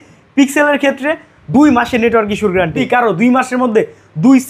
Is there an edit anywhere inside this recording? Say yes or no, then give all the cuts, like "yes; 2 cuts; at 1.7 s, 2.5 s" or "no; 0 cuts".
yes; 1 cut; at 2.8 s